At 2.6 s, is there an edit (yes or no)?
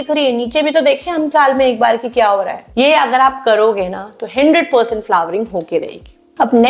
no